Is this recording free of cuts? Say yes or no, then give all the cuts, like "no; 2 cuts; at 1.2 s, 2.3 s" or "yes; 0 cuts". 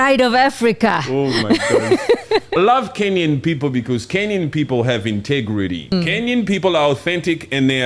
no; 2 cuts; at 2.6 s, 5.9 s